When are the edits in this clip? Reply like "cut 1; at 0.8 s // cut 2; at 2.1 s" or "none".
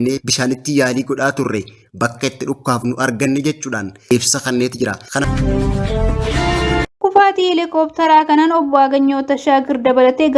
cut 1; at 4.1 s // cut 2; at 5.2 s // cut 3; at 6.9 s